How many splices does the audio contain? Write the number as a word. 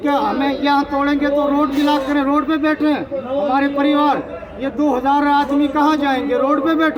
zero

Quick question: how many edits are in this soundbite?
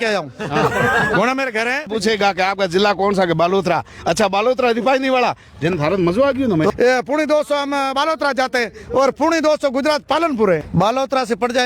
three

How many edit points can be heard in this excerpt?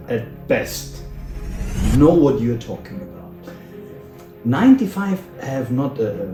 zero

